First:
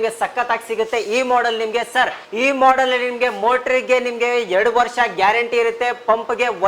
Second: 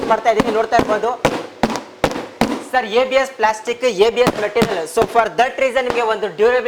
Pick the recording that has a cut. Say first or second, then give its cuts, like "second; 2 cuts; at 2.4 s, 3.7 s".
first; 1 cut; at 2.2 s